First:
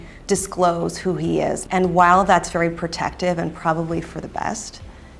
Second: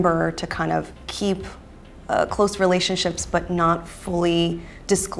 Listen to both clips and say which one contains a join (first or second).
first